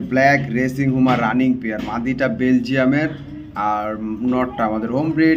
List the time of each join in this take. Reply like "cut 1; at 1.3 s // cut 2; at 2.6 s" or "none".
none